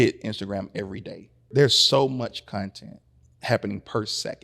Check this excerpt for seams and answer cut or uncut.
cut